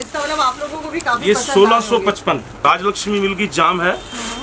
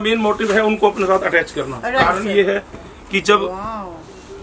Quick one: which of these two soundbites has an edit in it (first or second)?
first